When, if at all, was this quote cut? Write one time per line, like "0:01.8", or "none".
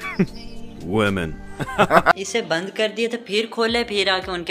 0:02.1